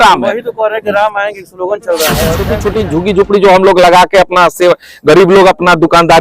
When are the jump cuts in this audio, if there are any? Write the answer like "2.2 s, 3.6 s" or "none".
2.5 s